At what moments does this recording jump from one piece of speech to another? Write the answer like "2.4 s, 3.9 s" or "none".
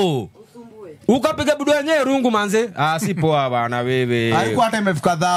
none